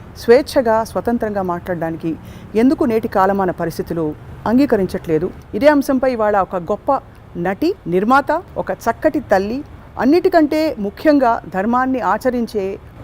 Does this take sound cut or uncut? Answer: cut